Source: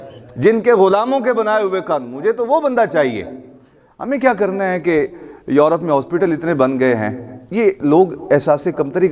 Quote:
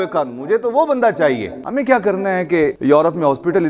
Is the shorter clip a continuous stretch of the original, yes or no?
no